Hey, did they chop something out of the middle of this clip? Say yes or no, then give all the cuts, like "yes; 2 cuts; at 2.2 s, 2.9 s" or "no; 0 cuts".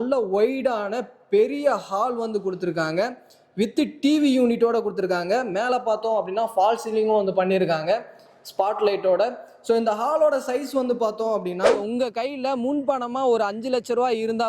yes; 1 cut; at 11.9 s